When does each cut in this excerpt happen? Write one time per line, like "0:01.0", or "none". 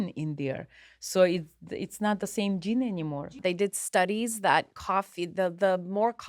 0:03.3